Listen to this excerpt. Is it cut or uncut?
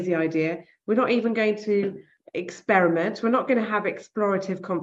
uncut